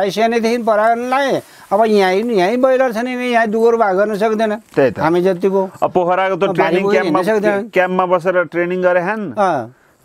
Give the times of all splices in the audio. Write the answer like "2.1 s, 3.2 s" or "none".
none